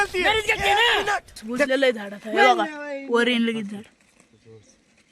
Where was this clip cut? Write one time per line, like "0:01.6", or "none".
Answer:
0:01.7